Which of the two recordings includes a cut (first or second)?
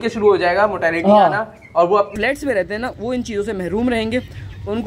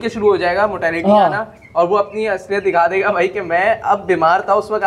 first